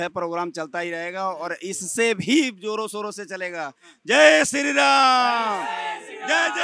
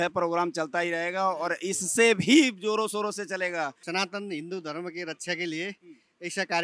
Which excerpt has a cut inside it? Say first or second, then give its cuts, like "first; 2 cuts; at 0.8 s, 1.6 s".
second; 1 cut; at 3.8 s